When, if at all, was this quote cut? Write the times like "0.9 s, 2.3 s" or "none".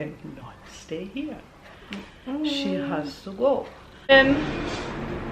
4.1 s